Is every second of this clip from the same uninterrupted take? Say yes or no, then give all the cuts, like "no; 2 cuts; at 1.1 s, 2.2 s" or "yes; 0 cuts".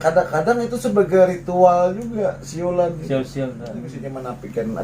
no; 1 cut; at 3.9 s